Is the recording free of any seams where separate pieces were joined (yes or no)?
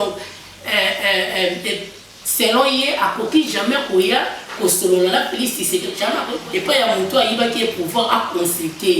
no